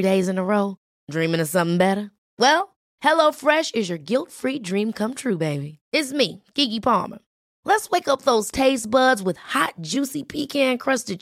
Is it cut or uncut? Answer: uncut